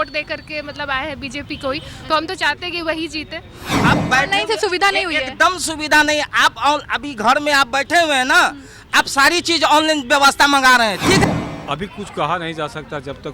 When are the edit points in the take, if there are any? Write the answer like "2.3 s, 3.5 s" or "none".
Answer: 3.8 s, 11.2 s

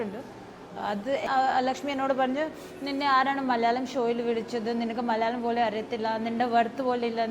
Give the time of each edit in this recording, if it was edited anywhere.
1.2 s

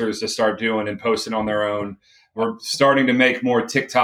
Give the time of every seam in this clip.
2.3 s

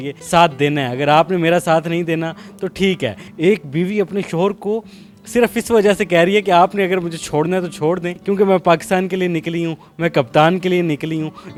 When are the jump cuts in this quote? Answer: none

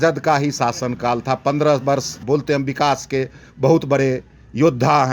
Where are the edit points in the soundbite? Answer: 2.2 s

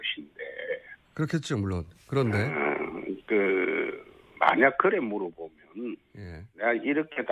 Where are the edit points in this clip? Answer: 4.3 s

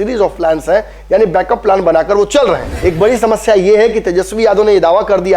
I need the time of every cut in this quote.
2.7 s

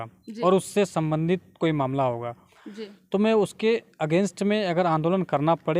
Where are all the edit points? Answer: none

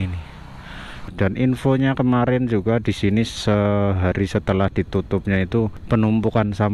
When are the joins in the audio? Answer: 1.1 s, 5.8 s

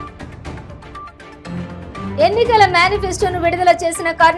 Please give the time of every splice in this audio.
2.1 s

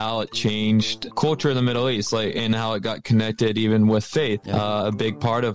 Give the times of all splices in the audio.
1.0 s, 4.4 s

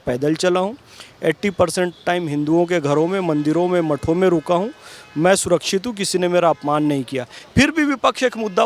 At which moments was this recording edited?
none

